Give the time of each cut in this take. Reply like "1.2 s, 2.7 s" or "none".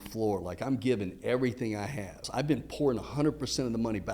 2.2 s